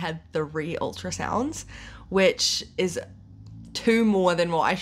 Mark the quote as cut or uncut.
uncut